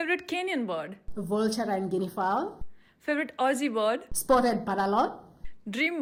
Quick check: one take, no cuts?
yes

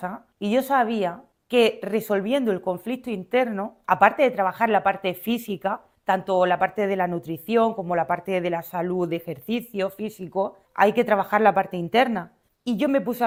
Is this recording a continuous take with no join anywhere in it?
yes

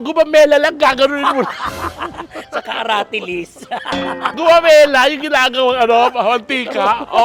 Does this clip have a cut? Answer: no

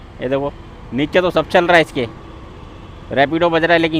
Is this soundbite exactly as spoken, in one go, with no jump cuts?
yes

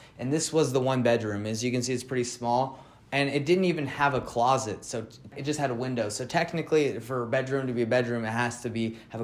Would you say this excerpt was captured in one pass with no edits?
no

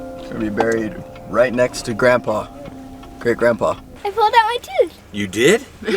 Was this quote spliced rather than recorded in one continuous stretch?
yes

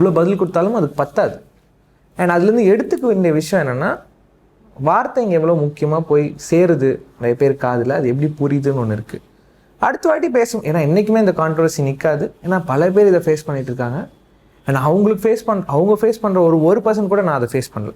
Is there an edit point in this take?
no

